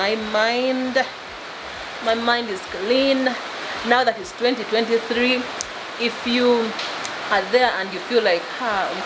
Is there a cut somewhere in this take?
no; 0 cuts

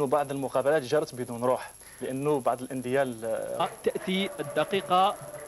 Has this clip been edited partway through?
no; 0 cuts

